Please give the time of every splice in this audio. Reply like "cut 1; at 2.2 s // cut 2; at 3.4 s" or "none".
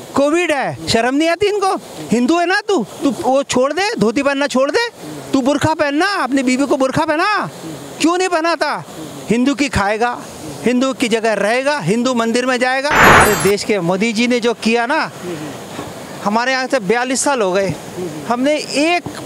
cut 1; at 13.2 s